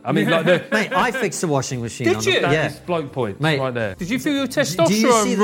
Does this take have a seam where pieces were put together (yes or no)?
yes